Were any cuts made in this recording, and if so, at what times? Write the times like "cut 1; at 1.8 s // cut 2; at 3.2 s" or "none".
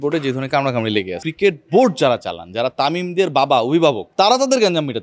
cut 1; at 1.2 s // cut 2; at 4.0 s